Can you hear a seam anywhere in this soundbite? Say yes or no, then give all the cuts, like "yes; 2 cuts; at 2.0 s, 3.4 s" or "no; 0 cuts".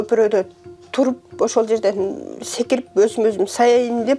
no; 0 cuts